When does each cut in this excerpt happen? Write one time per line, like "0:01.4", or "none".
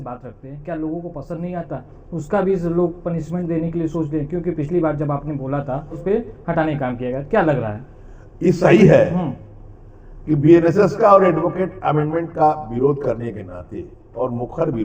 0:06.0